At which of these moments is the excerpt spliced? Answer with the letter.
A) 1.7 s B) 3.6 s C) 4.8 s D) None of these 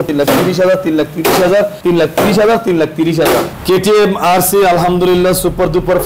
B